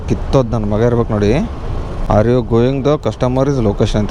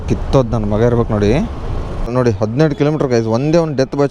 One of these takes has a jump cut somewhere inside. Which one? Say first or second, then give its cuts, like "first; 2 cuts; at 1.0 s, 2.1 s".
second; 1 cut; at 2.0 s